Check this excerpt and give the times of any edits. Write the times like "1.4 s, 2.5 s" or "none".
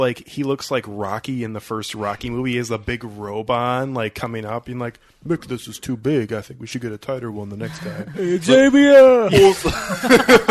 none